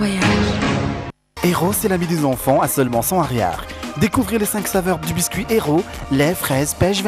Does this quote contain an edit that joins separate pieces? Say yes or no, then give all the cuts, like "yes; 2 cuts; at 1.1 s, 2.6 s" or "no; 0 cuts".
yes; 1 cut; at 1.3 s